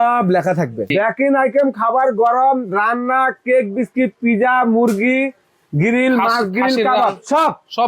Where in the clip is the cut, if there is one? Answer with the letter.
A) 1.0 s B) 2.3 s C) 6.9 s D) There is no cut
A